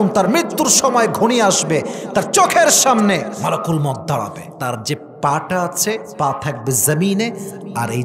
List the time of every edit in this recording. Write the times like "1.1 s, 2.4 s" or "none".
3.4 s, 4.5 s, 6.1 s